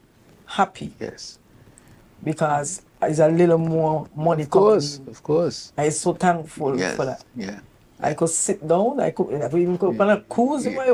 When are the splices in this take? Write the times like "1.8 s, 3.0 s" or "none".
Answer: none